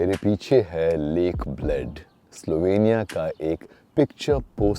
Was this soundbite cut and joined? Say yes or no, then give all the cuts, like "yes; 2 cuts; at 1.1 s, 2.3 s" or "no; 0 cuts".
yes; 1 cut; at 3.7 s